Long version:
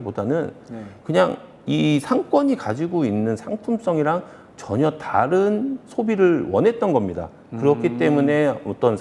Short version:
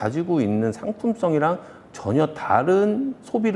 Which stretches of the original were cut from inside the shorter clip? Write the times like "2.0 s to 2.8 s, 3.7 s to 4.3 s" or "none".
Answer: none